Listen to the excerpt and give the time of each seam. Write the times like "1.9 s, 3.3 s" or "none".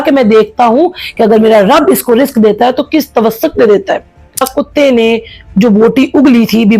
4.5 s